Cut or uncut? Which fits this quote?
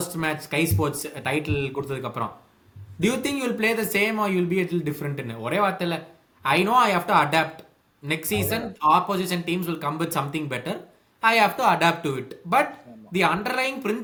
uncut